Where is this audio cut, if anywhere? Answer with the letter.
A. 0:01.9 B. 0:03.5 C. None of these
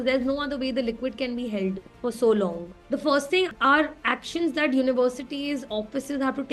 B